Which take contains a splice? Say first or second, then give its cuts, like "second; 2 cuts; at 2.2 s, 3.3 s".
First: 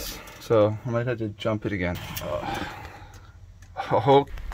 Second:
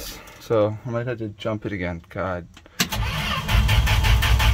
first; 1 cut; at 2.0 s